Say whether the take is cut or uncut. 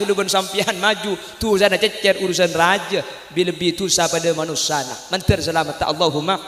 uncut